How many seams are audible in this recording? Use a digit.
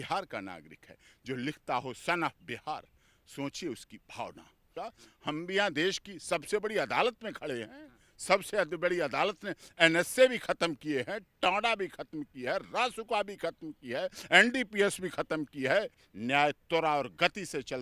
2